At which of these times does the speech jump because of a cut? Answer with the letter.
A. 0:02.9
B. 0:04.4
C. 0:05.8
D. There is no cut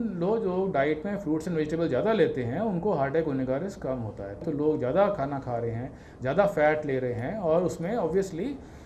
B